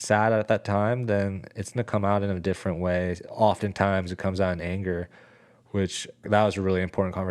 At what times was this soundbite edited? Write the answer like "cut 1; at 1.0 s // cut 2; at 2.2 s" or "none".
cut 1; at 3.2 s // cut 2; at 6.3 s